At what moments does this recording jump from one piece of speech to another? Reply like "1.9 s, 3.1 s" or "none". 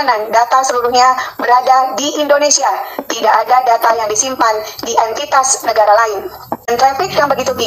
6.7 s